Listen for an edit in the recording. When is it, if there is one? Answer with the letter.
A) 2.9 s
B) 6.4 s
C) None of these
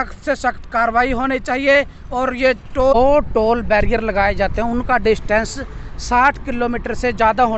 A